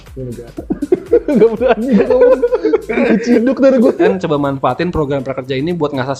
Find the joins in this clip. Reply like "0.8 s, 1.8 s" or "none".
4.1 s